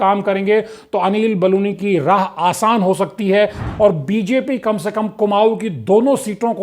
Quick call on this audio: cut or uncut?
cut